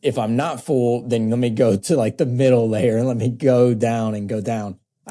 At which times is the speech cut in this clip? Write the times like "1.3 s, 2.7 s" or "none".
none

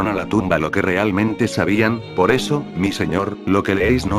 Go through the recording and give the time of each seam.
1.5 s

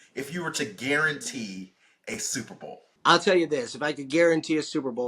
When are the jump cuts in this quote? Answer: 2.9 s

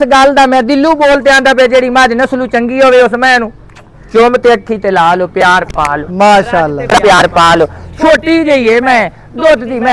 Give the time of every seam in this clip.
none

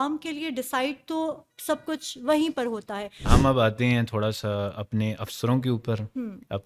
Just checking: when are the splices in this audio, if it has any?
3.3 s

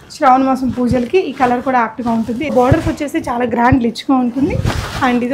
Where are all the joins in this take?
2.5 s

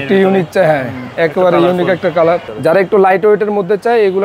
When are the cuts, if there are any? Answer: 2.5 s

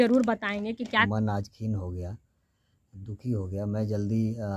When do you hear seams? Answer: 1.1 s

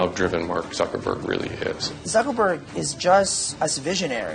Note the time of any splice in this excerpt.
1.9 s, 3.4 s

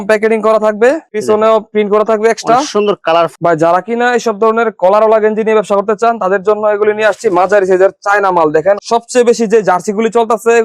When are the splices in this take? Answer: 3.3 s, 8.8 s

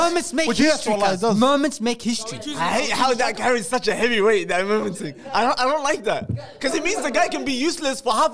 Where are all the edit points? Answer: 2.9 s

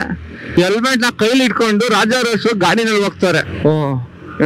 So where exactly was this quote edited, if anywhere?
3.4 s

